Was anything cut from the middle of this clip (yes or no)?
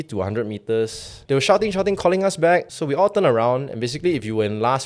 yes